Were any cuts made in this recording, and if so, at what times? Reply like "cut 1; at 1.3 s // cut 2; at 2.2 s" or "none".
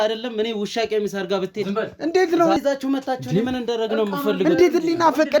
cut 1; at 2.6 s